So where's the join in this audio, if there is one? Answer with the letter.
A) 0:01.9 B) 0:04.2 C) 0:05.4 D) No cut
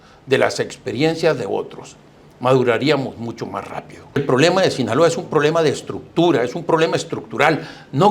B